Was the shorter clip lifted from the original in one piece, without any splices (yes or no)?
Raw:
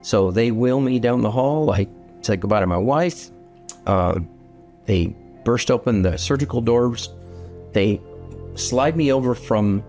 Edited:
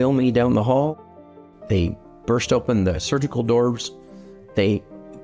no